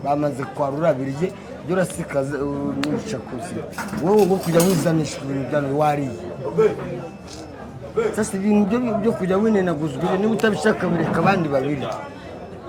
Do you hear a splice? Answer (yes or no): no